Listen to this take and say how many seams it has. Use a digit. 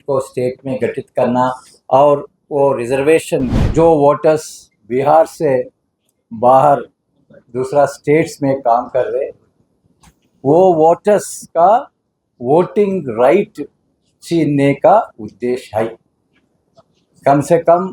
1